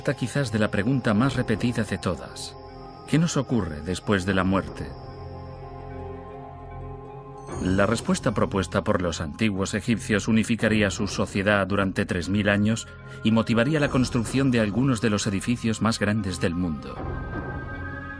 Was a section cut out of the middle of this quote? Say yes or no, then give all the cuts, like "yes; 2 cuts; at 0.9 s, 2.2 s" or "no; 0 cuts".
yes; 1 cut; at 8.7 s